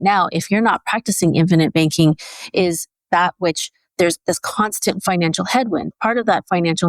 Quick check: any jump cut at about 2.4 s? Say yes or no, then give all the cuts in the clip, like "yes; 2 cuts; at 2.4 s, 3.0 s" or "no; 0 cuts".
no; 1 cut; at 5.9 s